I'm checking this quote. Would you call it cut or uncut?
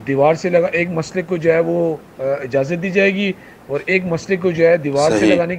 uncut